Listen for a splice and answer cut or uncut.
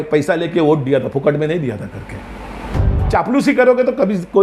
cut